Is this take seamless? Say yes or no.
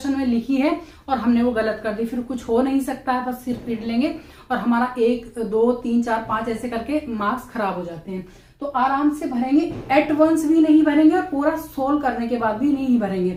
yes